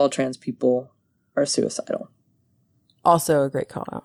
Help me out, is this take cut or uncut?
uncut